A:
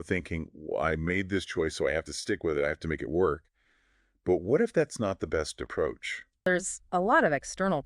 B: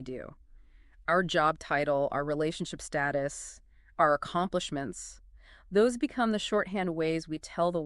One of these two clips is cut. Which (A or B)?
A